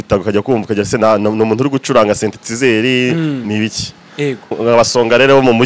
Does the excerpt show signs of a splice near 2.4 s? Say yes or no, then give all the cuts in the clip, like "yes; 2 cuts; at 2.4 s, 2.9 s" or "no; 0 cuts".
no; 1 cut; at 4.6 s